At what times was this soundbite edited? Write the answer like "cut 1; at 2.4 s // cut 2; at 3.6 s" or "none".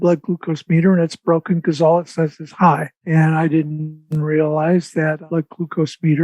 cut 1; at 3.1 s // cut 2; at 5.2 s